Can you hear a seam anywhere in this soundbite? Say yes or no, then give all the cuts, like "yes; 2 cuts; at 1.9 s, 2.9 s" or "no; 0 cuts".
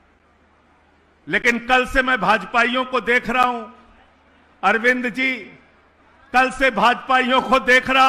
no; 0 cuts